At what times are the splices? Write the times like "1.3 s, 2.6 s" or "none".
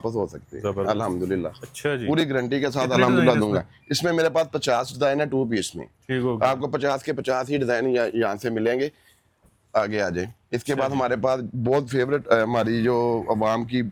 none

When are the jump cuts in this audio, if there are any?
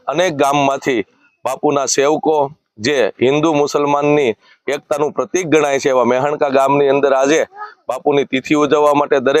none

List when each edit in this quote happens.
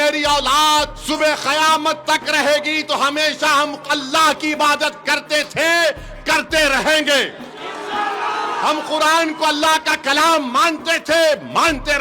1.0 s

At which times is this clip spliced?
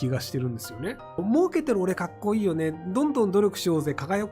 1.2 s

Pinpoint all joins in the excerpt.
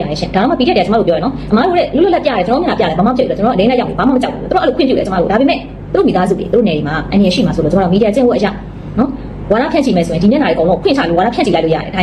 none

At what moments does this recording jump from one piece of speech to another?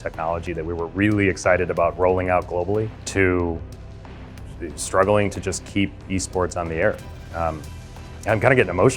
3.0 s

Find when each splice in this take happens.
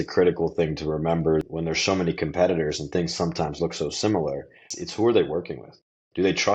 1.4 s, 4.6 s

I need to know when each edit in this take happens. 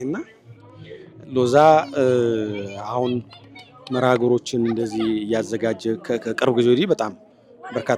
none

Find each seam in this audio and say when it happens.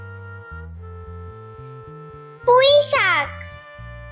none

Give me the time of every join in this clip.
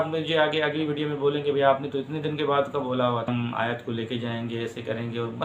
3.3 s

